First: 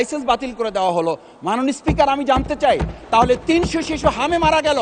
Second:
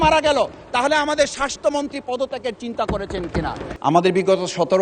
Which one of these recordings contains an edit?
second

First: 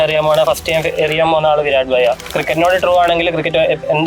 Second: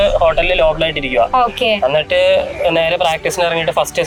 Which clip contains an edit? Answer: first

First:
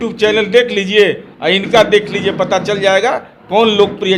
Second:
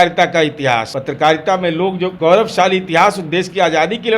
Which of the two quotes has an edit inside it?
second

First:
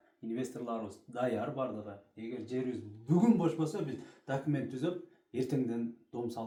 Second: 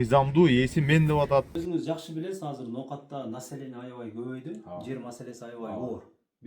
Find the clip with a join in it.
second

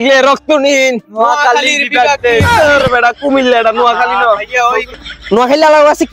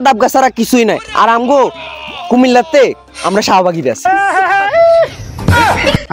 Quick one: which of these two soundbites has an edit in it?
first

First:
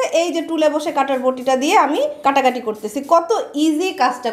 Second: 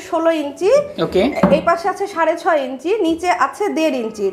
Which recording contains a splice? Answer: first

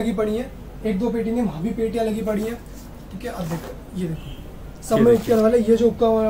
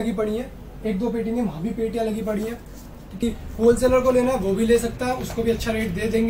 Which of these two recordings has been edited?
second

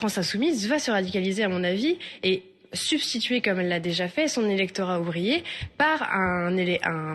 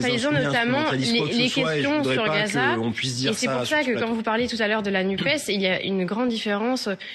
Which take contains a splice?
second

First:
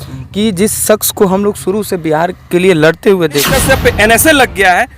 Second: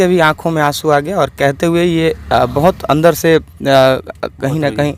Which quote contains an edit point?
first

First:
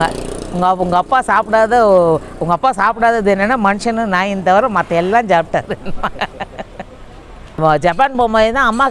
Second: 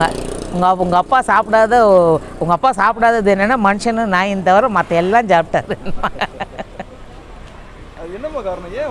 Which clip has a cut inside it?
first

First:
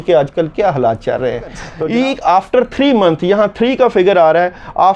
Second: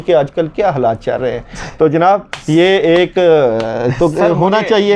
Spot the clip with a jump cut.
first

